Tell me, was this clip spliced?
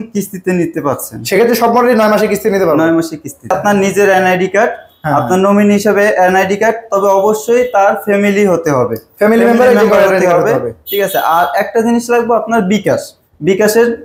yes; 1 cut; at 3.6 s

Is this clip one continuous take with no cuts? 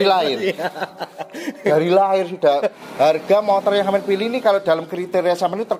no; 1 cut; at 2.8 s

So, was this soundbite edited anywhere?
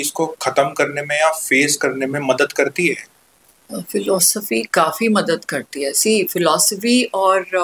no; 0 cuts

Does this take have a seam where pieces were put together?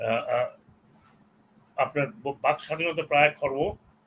no; 0 cuts

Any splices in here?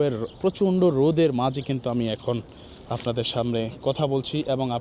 no; 0 cuts

